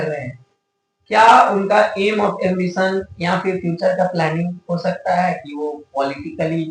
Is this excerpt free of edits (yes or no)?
yes